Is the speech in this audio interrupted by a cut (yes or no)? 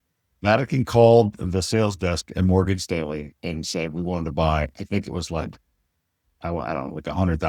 no